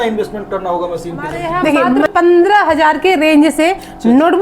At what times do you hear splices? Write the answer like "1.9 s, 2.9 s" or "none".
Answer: 2.1 s